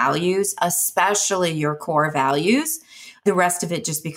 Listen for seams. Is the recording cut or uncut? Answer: cut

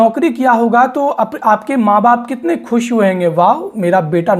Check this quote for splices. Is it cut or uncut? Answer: uncut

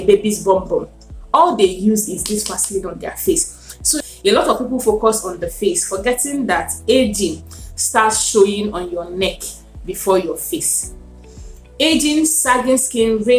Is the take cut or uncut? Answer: cut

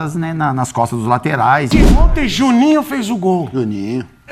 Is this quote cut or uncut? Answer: cut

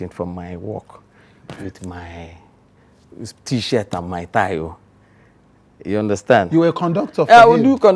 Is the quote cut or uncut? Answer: uncut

